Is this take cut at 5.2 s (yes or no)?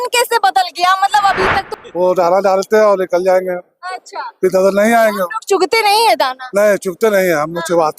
no